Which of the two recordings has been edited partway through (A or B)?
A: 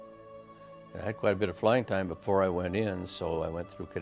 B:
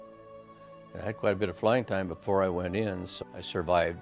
A